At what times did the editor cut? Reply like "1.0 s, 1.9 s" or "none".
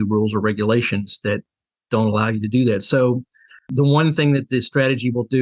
3.7 s